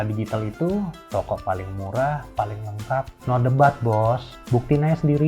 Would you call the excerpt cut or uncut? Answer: cut